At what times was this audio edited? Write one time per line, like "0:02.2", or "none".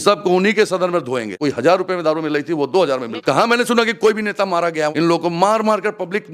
0:01.3
0:03.1
0:04.9